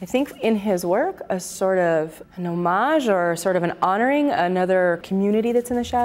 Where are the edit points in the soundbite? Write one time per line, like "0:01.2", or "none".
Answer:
0:02.2
0:05.0